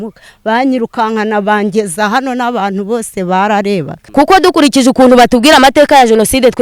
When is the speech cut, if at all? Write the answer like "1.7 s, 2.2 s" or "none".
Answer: 4.0 s